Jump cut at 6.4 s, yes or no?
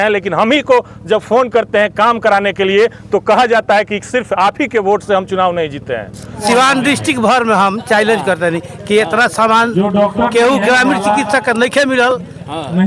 yes